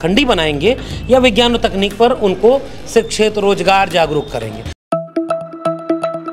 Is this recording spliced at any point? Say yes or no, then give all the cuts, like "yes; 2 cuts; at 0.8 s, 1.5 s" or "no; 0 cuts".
yes; 1 cut; at 4.8 s